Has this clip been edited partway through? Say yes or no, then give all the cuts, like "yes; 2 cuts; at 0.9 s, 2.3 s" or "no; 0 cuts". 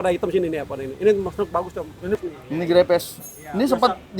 yes; 1 cut; at 2.2 s